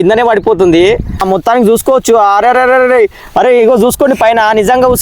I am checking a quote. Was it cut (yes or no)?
yes